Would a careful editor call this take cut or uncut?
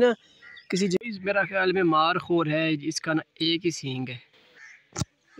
cut